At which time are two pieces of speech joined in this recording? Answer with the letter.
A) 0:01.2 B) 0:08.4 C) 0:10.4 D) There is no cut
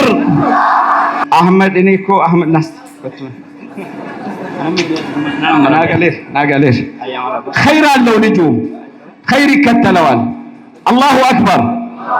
A